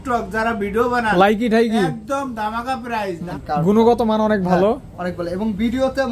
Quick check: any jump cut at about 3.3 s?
yes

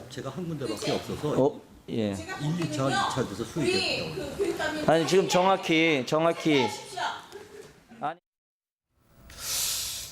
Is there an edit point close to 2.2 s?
yes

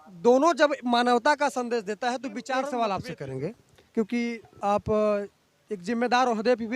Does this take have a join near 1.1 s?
no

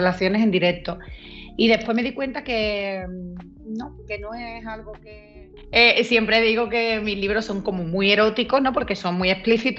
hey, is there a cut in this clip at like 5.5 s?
yes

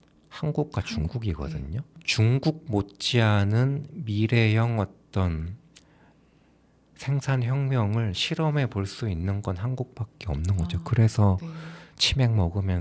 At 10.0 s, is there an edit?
no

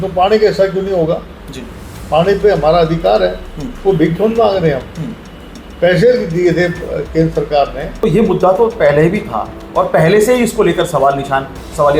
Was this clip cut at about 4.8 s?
no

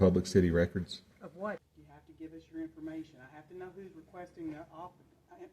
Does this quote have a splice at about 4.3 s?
no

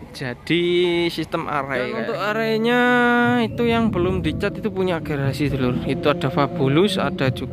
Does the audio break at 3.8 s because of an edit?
no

